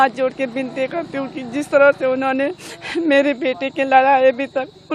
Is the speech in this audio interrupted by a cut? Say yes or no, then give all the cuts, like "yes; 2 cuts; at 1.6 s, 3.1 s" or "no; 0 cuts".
no; 0 cuts